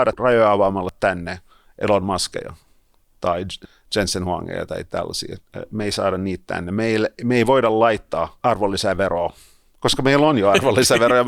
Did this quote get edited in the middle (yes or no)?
yes